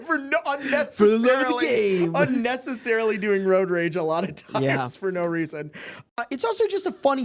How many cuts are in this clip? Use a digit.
1